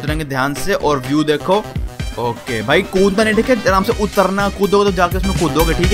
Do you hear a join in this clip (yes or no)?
no